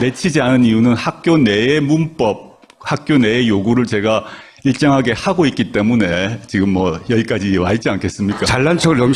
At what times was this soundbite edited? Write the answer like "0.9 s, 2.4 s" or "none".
none